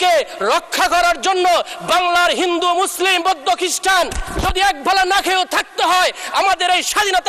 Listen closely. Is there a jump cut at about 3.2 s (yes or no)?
no